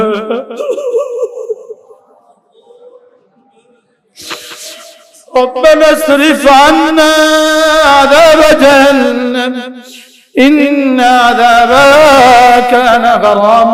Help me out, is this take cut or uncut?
uncut